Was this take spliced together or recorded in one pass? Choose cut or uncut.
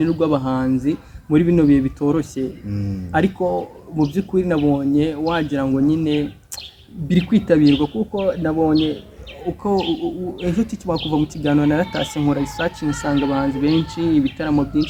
uncut